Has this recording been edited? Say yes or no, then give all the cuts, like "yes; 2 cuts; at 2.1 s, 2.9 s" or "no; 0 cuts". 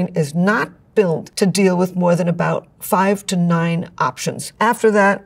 yes; 1 cut; at 1.3 s